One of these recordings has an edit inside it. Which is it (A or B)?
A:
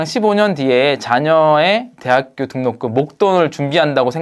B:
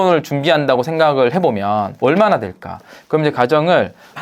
B